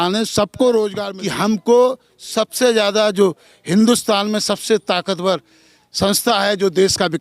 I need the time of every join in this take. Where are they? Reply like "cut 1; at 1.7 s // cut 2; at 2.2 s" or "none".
cut 1; at 1.1 s